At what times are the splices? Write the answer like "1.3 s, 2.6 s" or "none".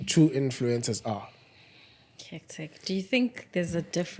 none